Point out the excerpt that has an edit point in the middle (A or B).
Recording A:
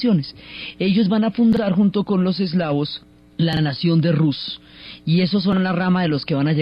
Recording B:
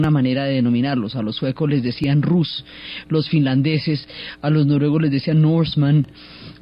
A